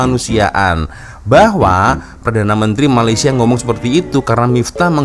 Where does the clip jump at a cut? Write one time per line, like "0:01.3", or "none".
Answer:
none